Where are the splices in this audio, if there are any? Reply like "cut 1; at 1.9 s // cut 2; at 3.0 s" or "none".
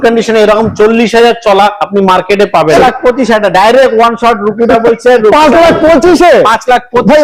cut 1; at 2.7 s